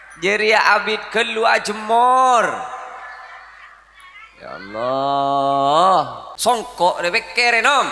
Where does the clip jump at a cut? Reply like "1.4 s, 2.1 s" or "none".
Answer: 6.2 s